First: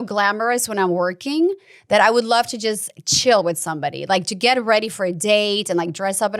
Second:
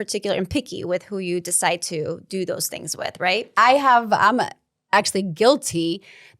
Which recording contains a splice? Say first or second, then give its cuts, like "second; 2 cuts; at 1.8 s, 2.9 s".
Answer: second; 1 cut; at 3.5 s